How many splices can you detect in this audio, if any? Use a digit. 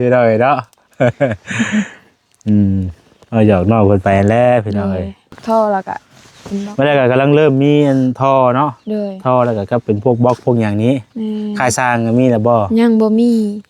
1